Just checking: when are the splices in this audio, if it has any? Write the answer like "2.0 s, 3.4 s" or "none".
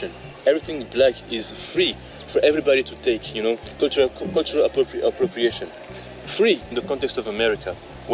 6.7 s